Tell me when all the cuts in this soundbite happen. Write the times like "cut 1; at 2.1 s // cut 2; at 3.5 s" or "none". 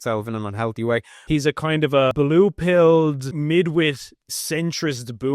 cut 1; at 1.1 s // cut 2; at 2.1 s // cut 3; at 3.4 s